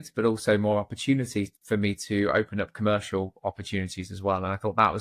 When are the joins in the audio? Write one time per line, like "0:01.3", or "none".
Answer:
none